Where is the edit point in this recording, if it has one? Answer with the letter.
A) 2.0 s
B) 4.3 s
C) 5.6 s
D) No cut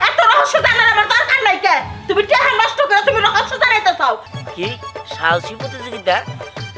B